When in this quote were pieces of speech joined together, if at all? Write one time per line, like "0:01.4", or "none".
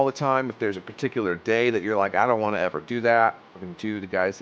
none